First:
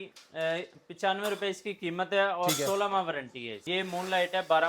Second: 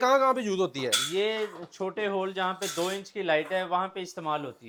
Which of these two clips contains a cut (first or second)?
first